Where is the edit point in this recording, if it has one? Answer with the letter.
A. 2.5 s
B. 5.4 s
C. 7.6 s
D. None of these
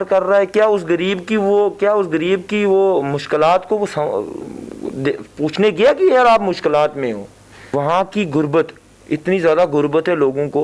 C